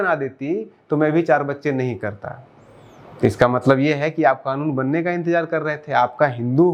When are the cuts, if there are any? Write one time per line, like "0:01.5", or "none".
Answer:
none